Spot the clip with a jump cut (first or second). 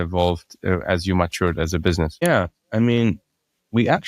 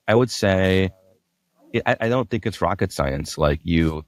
first